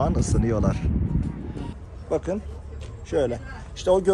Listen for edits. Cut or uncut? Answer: cut